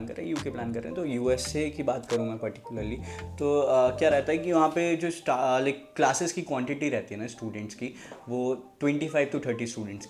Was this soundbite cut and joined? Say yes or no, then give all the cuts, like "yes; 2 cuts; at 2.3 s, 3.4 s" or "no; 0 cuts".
no; 0 cuts